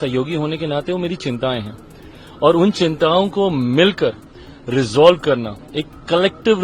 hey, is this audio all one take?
yes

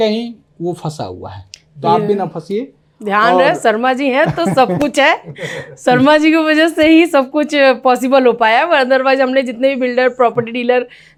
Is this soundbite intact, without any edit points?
yes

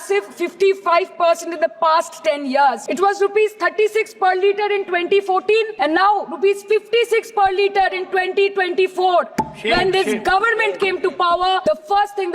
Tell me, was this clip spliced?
yes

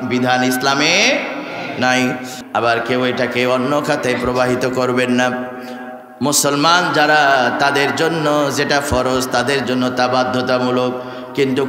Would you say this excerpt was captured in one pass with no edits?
no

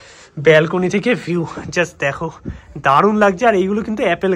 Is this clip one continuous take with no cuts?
yes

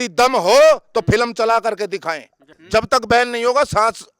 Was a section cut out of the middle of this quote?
yes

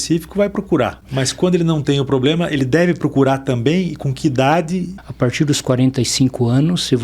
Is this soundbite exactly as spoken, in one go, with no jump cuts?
no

